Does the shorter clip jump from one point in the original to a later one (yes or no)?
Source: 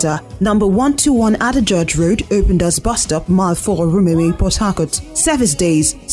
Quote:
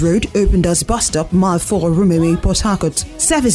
no